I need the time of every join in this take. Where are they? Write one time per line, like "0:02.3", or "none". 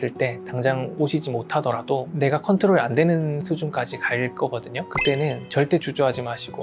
none